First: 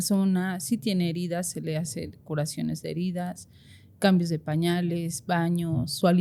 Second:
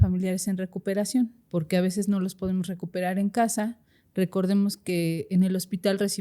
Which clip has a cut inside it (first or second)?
second